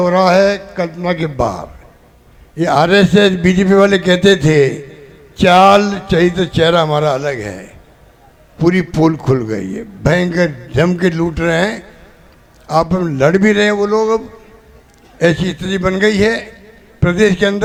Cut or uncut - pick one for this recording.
uncut